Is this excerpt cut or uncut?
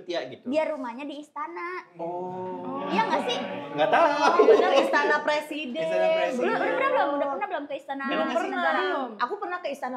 uncut